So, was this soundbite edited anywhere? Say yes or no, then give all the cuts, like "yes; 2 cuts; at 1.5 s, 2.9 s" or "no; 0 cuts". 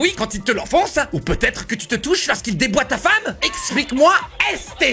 no; 0 cuts